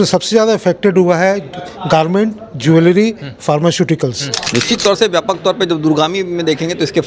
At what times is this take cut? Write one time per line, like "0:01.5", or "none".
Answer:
0:04.4